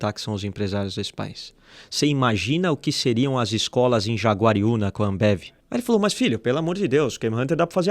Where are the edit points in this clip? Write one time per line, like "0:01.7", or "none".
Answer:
0:05.5